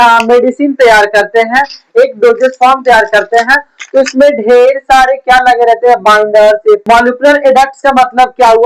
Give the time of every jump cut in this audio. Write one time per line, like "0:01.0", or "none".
0:06.8